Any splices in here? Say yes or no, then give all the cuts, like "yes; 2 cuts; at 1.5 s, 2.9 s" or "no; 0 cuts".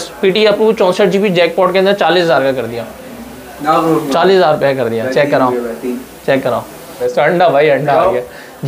yes; 1 cut; at 7.0 s